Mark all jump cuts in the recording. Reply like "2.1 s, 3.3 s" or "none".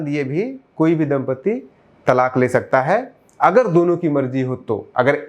none